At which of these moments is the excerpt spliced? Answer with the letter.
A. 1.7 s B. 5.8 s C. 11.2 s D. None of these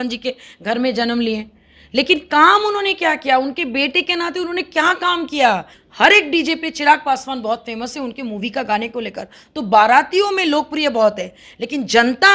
B